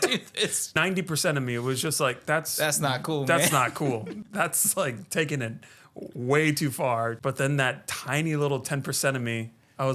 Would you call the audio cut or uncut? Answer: cut